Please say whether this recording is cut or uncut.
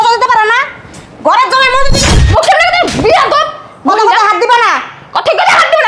cut